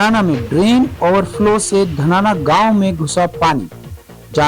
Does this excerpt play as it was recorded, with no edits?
yes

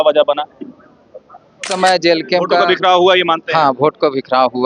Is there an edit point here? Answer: yes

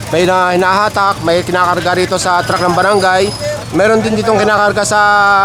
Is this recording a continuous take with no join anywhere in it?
yes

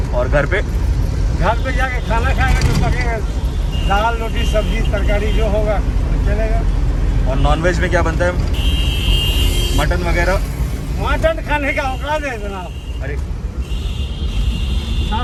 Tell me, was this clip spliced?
no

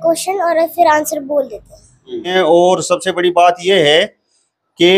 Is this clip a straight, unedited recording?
no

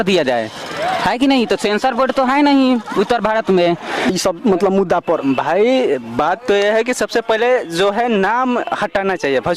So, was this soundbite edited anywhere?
yes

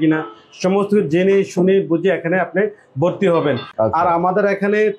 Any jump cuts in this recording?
yes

